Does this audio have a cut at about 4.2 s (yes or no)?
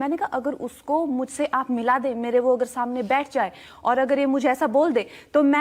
yes